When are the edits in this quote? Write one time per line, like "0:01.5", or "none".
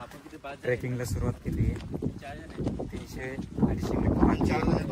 none